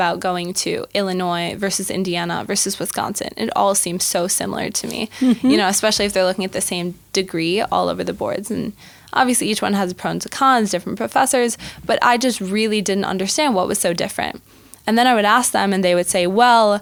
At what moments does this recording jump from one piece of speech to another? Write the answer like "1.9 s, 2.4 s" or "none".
none